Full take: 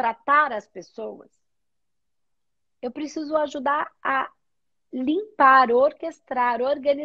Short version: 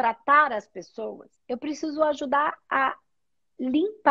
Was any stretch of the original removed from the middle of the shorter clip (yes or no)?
yes